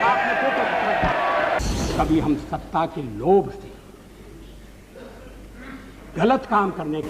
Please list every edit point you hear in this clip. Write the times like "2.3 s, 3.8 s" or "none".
1.6 s